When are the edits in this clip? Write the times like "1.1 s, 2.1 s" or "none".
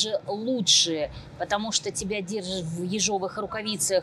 none